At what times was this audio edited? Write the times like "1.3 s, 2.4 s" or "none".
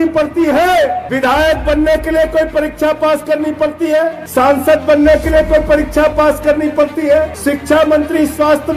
1.0 s, 4.2 s, 7.3 s